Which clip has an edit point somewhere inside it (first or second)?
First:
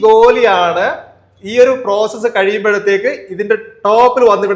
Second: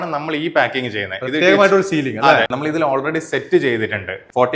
second